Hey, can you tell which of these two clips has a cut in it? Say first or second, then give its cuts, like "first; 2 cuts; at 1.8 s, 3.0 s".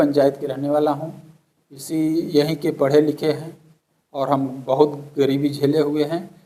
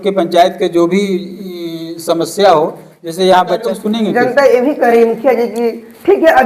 second; 1 cut; at 3.6 s